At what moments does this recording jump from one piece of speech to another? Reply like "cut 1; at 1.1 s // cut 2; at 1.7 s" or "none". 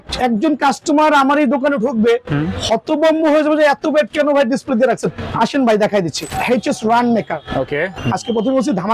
cut 1; at 6.3 s // cut 2; at 8.0 s